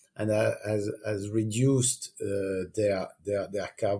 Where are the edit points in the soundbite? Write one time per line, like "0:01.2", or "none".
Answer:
none